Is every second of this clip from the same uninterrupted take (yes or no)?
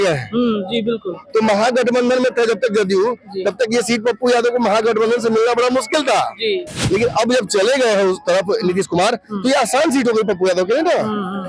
yes